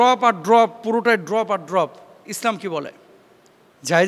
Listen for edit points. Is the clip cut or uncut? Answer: uncut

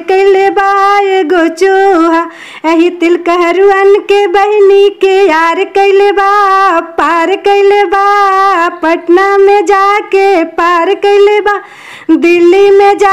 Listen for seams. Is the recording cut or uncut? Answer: uncut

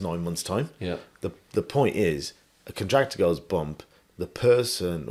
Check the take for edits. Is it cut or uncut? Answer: uncut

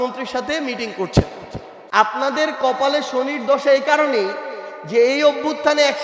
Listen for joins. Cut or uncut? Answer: cut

